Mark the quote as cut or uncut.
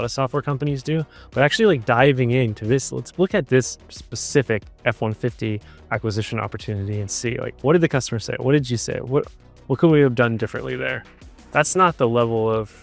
uncut